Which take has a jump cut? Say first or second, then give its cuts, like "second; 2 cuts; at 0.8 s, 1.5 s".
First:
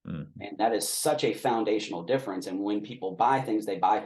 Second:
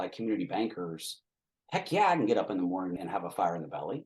second; 1 cut; at 3.0 s